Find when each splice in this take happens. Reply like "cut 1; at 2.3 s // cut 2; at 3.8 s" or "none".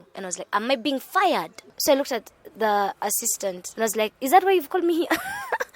cut 1; at 1.6 s // cut 2; at 3.6 s